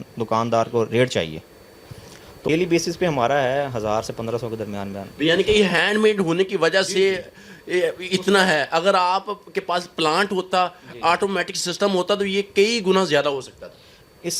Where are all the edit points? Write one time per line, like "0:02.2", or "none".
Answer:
0:02.5